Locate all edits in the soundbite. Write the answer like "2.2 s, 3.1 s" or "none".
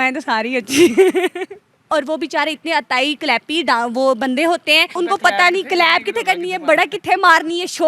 1.9 s, 5.0 s